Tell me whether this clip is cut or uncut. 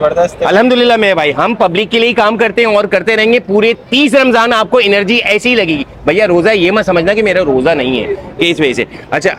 uncut